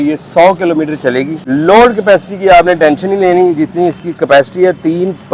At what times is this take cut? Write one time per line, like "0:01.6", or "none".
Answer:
0:01.4